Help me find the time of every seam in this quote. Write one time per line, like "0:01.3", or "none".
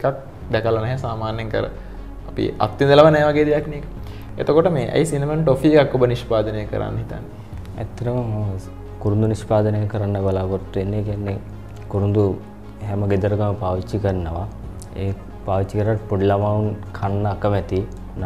none

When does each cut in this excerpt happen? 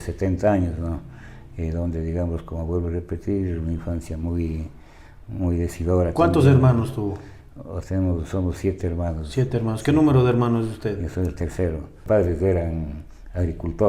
0:12.0

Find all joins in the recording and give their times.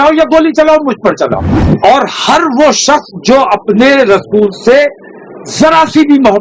0:01.5

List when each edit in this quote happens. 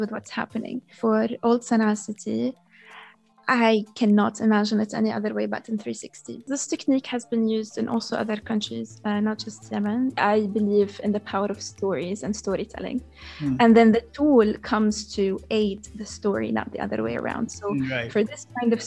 0:00.9
0:06.5
0:10.2

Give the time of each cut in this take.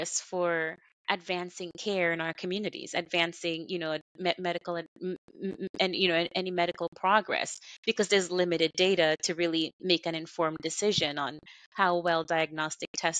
none

